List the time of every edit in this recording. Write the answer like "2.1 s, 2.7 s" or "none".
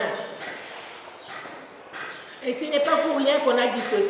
1.8 s